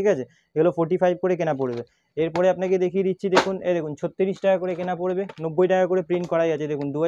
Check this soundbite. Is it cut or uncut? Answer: uncut